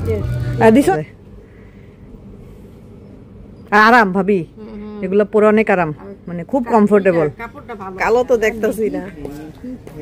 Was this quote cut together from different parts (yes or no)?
yes